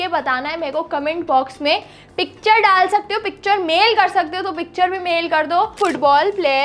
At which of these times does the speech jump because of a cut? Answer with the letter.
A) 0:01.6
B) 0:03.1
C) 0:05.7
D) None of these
C